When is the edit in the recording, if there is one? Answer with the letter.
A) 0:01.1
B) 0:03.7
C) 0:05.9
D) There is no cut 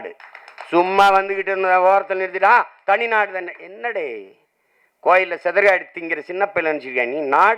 D